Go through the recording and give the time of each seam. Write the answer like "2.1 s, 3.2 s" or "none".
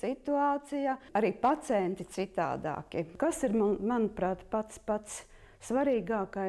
3.1 s